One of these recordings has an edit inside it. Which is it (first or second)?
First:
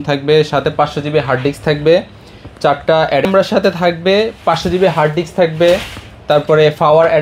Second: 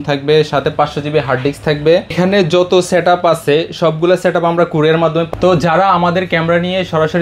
second